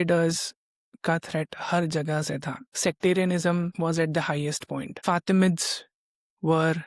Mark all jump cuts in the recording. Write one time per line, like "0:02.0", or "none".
0:02.6
0:03.7
0:04.9